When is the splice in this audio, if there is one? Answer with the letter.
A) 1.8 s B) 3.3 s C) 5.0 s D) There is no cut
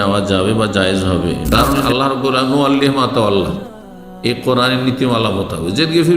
A